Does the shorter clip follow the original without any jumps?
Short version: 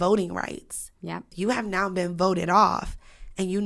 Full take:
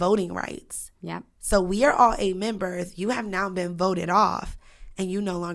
no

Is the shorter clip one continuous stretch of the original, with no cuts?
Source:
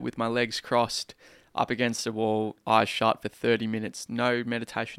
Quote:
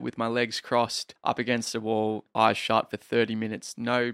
no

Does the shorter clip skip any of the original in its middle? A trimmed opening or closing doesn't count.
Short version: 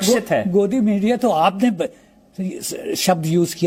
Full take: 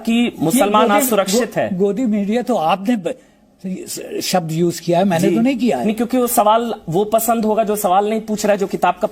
no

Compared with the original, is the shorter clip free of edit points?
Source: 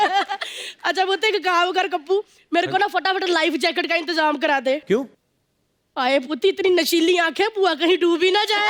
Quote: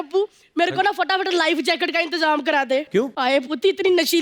no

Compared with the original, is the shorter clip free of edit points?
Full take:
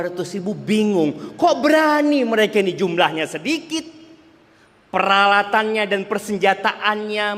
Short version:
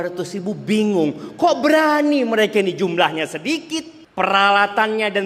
no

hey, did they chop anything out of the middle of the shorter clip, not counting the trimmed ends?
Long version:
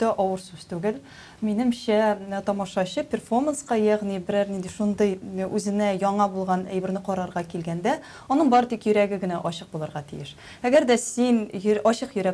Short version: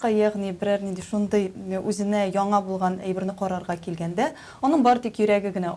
no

